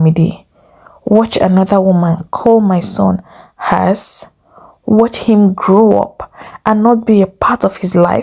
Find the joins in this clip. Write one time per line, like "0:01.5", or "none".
none